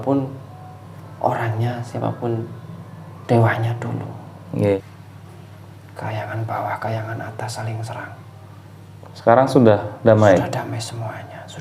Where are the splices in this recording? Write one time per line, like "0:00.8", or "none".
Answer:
0:04.8